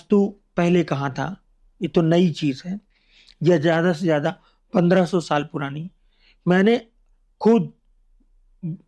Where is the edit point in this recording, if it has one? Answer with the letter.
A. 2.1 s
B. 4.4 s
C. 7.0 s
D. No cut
D